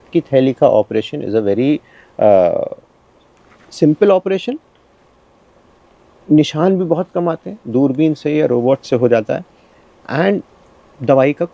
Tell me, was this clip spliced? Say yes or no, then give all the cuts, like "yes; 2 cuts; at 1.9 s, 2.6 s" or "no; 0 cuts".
no; 0 cuts